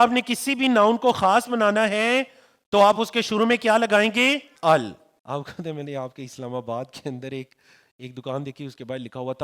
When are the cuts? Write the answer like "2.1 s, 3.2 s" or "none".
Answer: 4.5 s, 5.1 s